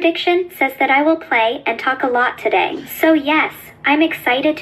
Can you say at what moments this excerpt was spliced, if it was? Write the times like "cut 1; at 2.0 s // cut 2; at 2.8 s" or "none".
cut 1; at 2.8 s